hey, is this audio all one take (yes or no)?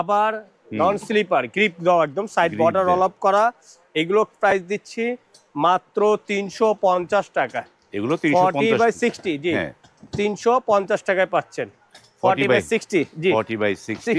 yes